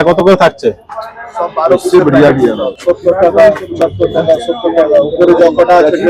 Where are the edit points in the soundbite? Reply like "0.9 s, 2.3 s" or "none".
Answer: 2.7 s